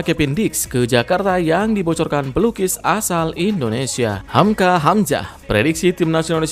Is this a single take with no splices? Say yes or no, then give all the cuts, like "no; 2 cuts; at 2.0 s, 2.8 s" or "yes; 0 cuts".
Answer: no; 1 cut; at 4.2 s